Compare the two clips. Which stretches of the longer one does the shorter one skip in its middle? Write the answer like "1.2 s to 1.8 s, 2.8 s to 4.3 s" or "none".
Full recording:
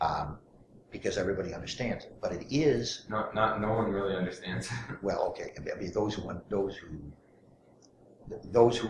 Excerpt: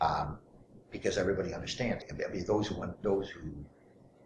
2.1 s to 5.6 s